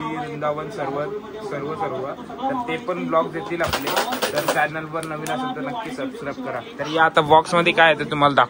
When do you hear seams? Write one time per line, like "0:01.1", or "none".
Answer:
none